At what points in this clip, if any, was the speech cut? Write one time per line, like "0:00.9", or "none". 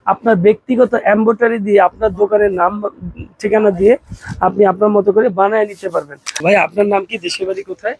0:06.4